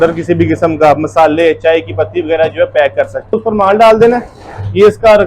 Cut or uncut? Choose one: cut